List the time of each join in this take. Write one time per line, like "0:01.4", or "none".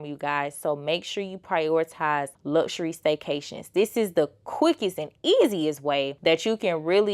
0:02.4
0:06.1